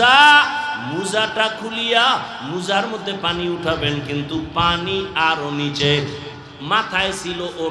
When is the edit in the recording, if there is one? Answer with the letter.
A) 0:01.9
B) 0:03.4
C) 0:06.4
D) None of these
D